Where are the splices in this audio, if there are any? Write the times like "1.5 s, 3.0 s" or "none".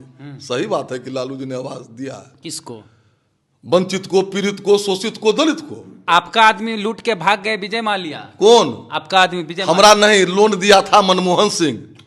6.1 s